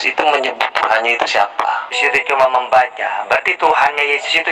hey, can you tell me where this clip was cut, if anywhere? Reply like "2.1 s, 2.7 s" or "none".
1.9 s